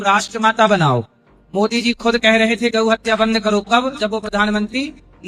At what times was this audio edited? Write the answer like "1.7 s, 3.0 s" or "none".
none